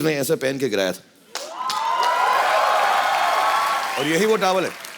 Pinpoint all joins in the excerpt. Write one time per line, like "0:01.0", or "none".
0:03.9